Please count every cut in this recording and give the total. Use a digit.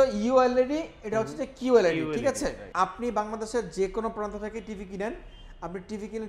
1